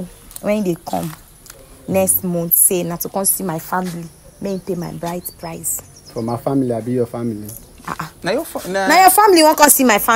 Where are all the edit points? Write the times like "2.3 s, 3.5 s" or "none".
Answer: none